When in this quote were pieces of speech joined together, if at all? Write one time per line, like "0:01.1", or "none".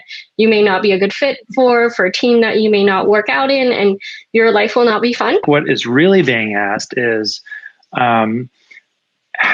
0:05.4